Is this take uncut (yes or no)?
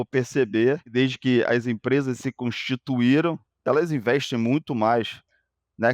no